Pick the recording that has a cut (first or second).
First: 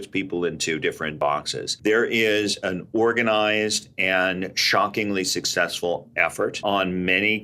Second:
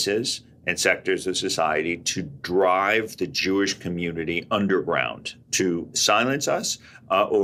first